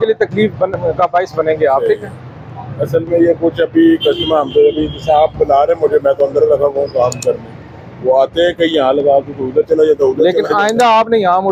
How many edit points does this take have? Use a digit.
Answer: 0